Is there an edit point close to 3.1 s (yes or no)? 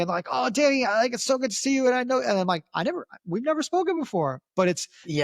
no